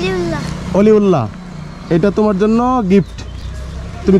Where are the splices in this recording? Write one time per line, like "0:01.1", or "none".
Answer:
none